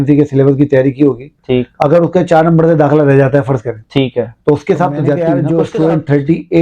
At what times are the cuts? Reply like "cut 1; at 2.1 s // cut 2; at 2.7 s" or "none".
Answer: cut 1; at 5.2 s

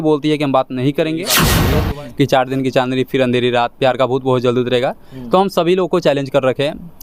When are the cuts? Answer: cut 1; at 1.6 s

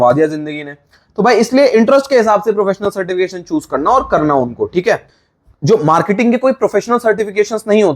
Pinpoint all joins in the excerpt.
cut 1; at 5.0 s

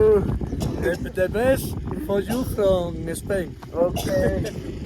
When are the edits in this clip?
none

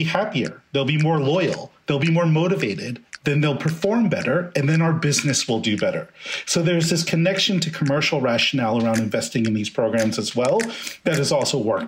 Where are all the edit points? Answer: none

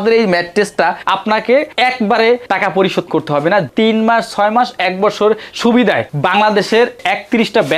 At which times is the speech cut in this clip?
cut 1; at 1.0 s // cut 2; at 3.7 s

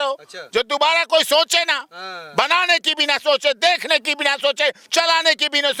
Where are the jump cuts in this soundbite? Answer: none

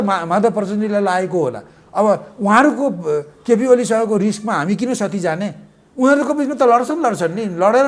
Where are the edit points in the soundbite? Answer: none

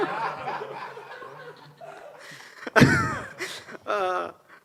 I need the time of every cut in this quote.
none

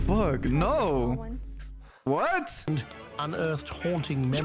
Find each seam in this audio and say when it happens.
cut 1; at 2.7 s

